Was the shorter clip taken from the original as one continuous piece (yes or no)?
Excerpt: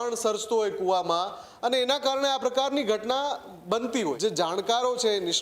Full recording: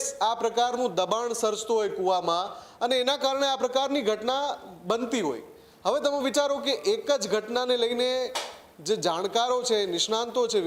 no